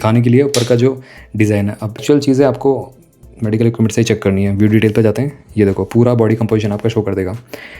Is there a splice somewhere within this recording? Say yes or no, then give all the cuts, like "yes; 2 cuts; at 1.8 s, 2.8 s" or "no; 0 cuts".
yes; 1 cut; at 2.0 s